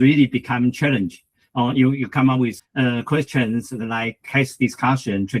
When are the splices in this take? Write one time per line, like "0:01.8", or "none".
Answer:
0:02.6